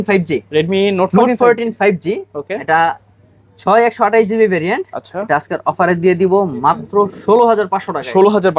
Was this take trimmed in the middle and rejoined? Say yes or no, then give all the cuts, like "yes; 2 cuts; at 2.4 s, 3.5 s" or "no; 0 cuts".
no; 0 cuts